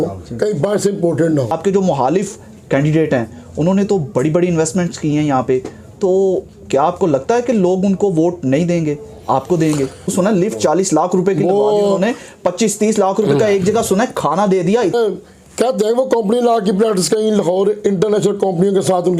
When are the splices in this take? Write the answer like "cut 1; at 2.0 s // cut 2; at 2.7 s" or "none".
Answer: cut 1; at 1.5 s // cut 2; at 10.1 s // cut 3; at 14.9 s

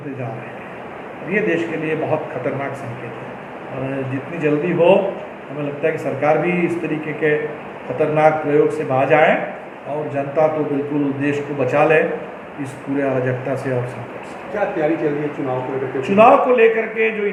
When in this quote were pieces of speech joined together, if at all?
none

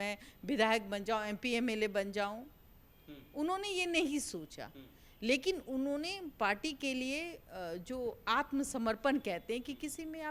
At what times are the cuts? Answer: none

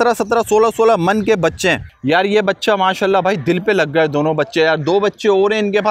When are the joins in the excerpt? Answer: cut 1; at 1.9 s

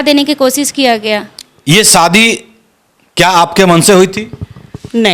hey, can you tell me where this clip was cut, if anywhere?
cut 1; at 1.5 s

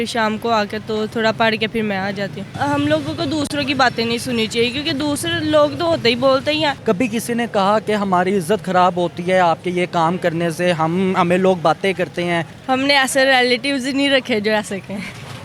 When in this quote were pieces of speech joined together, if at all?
cut 1; at 2.5 s // cut 2; at 6.8 s // cut 3; at 12.5 s

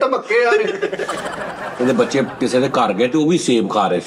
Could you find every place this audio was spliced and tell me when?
cut 1; at 1.5 s

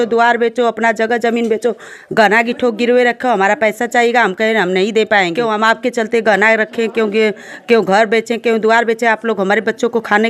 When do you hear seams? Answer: cut 1; at 5.8 s

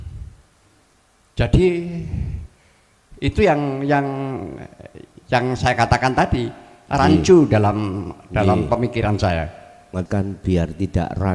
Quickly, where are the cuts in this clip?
cut 1; at 10.0 s

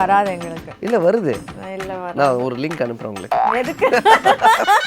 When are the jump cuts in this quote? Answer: cut 1; at 3.4 s

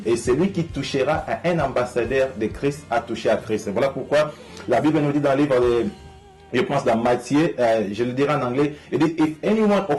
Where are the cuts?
none

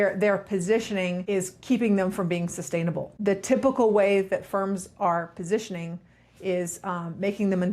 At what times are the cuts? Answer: cut 1; at 1.2 s // cut 2; at 3.1 s

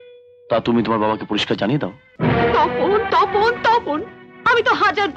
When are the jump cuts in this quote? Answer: cut 1; at 2.1 s

